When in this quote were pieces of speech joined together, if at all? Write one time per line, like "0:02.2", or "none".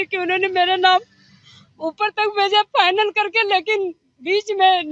none